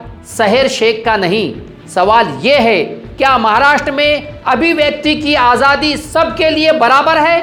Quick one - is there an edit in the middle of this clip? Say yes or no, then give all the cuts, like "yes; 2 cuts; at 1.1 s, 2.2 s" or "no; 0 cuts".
no; 0 cuts